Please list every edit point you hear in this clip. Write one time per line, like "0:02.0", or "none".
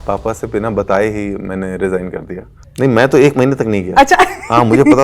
0:02.6